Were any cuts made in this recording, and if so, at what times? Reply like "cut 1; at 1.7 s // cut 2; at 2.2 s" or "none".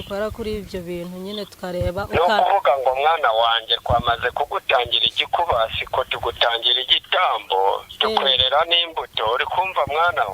none